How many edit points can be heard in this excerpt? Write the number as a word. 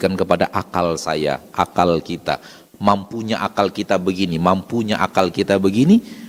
zero